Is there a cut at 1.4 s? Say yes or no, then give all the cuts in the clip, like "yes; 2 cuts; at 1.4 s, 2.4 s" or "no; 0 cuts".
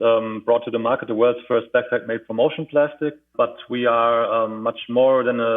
no; 1 cut; at 3.2 s